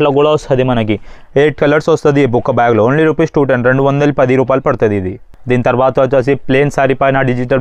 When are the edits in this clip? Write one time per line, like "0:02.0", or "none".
none